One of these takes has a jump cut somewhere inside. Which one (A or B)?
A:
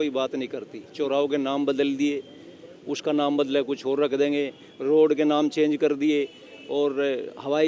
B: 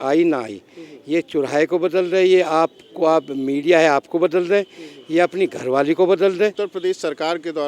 B